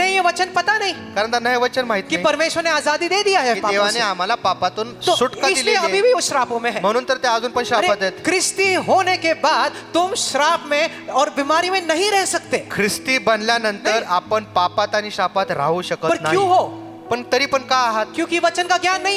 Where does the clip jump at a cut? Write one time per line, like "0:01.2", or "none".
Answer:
none